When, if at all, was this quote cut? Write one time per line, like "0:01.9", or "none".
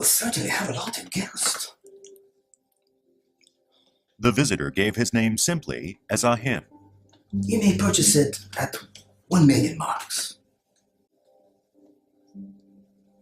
0:09.9